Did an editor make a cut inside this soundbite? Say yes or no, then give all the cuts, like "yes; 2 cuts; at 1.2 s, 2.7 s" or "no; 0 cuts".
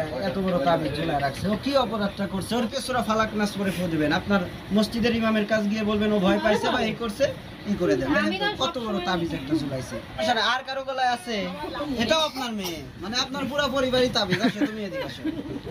no; 0 cuts